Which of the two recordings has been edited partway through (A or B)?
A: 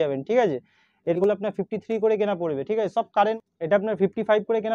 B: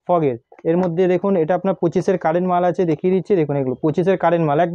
A